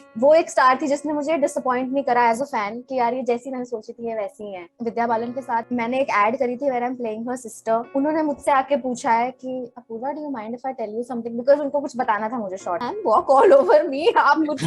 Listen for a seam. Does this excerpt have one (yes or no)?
yes